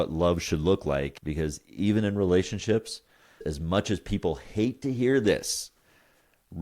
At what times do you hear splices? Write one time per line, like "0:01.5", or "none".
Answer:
0:01.2
0:03.4